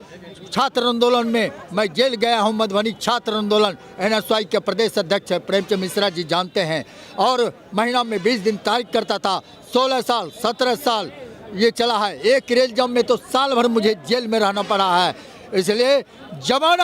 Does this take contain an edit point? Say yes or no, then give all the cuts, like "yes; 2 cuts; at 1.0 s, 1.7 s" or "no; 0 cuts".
no; 0 cuts